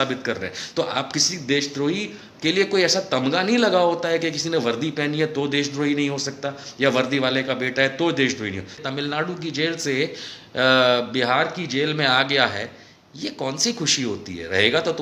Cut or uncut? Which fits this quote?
cut